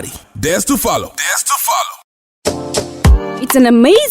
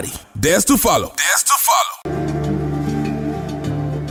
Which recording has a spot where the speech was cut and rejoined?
first; 1 cut; at 1.9 s

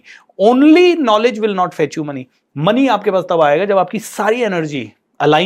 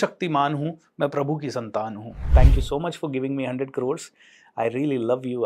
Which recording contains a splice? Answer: second; 1 cut; at 2.3 s

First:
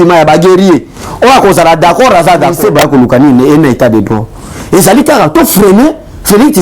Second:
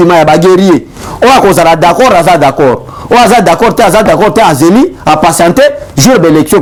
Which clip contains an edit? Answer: first; 1 cut; at 2.6 s

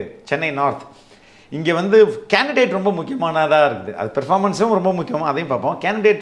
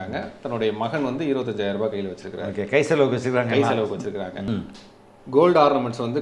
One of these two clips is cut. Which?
second; 1 cut; at 4.4 s

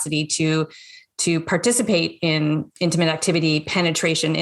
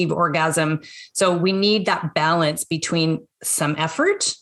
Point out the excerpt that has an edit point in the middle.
first; 1 cut; at 2.7 s

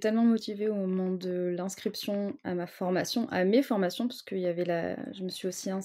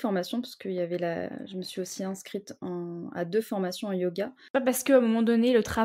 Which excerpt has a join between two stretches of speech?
second; 1 cut; at 4.4 s

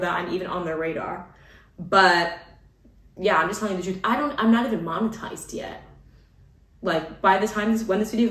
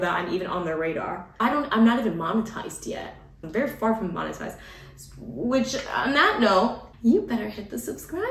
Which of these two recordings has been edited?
second; 3 cuts; at 1.3 s, 3.5 s, 6.9 s

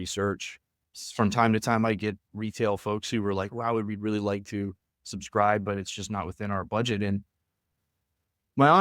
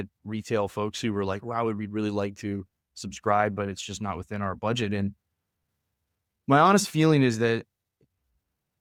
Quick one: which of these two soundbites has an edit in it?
first; 1 cut; at 0.9 s

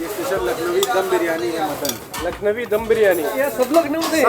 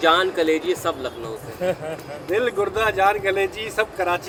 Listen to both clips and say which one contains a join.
first; 1 cut; at 3.3 s

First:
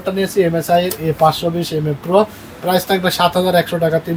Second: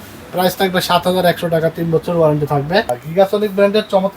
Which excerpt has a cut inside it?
second; 1 cut; at 3.0 s

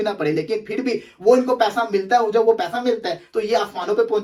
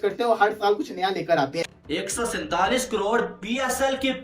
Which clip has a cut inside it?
second; 1 cut; at 1.8 s

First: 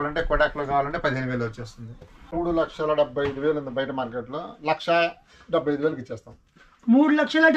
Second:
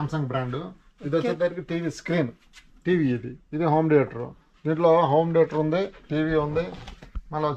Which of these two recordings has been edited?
first; 1 cut; at 2.1 s

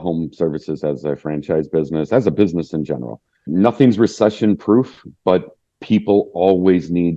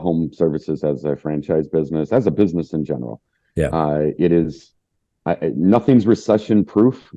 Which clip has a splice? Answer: first; 1 cut; at 3.5 s

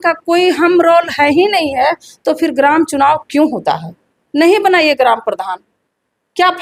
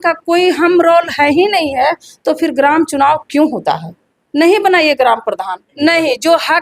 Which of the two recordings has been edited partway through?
second; 1 cut; at 5.7 s

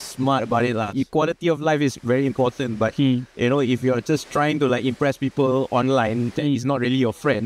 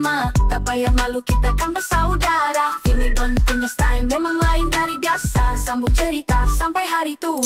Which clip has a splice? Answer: first; 1 cut; at 0.9 s

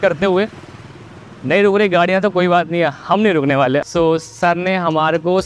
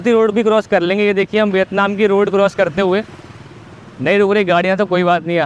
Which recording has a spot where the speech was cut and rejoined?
first; 1 cut; at 3.8 s

